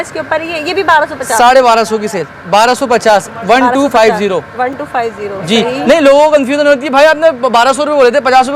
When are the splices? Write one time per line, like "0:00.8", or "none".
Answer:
none